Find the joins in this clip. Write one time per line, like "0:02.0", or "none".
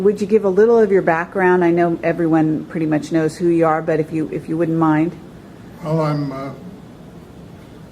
0:03.6